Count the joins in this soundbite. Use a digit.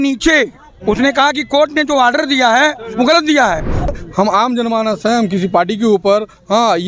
1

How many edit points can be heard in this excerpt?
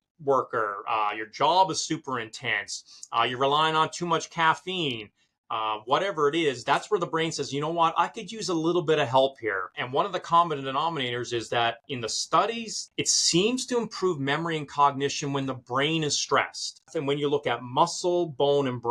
3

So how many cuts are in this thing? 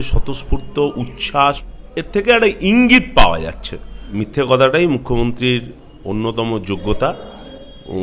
2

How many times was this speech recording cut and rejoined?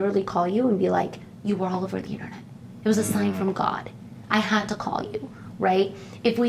0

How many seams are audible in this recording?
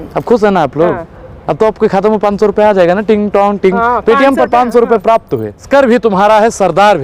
1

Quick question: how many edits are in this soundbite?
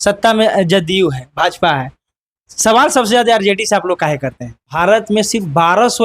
1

